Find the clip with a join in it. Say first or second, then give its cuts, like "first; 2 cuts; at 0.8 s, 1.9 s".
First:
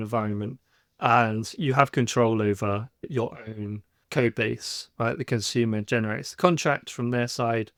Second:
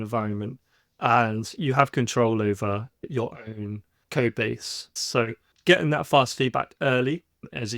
second; 1 cut; at 4.9 s